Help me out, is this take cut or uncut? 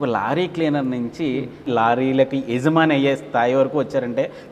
cut